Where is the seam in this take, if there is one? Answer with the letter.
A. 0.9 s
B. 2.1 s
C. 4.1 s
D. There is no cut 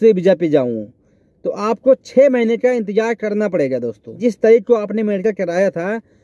C